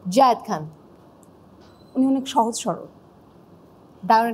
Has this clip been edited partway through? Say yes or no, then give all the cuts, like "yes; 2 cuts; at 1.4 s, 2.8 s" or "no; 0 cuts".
no; 0 cuts